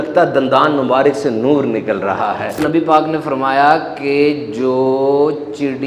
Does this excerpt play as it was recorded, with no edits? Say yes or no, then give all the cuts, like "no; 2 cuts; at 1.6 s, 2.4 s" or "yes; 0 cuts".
no; 1 cut; at 2.6 s